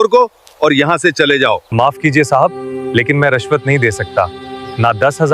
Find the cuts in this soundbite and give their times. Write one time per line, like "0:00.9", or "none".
0:01.6